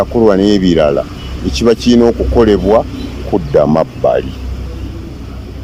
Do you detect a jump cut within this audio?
no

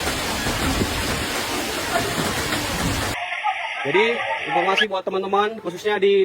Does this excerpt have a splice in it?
yes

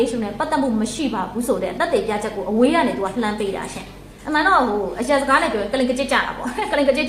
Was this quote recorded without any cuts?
no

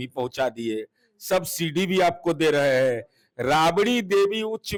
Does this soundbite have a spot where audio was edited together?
no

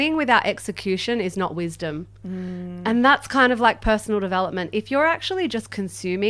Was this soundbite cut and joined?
no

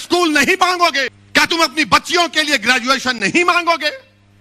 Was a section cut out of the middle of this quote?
yes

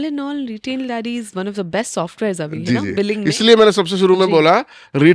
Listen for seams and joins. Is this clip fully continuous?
yes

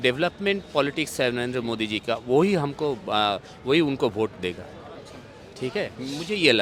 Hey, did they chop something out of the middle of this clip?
no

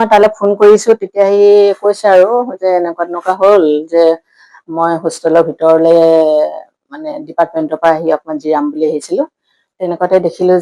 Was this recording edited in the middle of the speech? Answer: yes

